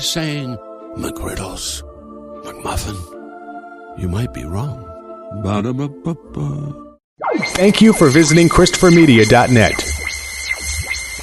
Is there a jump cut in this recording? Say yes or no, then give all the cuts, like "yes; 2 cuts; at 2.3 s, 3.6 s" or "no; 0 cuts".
yes; 1 cut; at 7.1 s